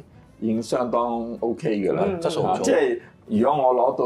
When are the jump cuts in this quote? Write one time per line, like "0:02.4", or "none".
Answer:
none